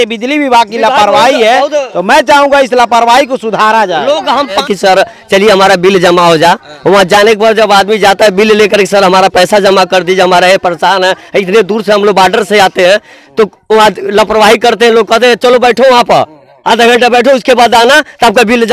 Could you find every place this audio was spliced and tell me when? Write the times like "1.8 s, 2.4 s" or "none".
4.6 s

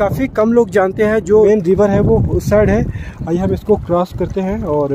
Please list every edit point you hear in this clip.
1.5 s

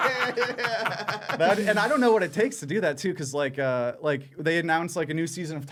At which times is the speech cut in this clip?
none

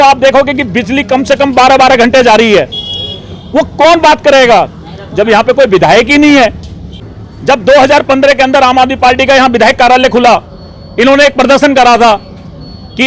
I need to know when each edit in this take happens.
7.0 s

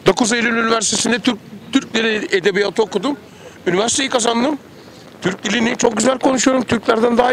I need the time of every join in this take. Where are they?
none

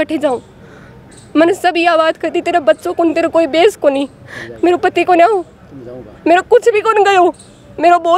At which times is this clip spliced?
none

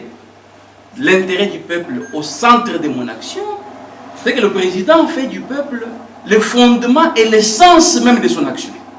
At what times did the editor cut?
none

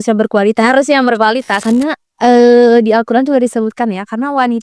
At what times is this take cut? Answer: 1.5 s

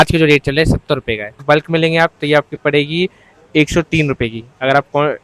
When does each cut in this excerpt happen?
1.4 s

